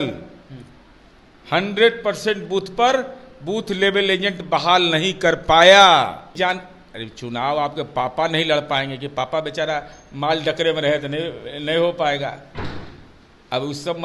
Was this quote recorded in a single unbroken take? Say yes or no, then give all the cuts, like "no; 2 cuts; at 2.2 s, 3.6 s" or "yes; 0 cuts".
no; 1 cut; at 6.3 s